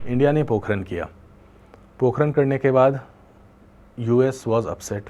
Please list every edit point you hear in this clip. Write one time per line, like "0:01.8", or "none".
none